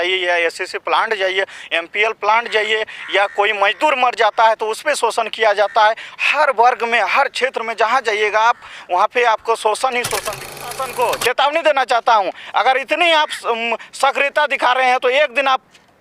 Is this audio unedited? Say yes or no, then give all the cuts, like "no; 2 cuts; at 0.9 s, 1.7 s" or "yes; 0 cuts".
no; 1 cut; at 10.5 s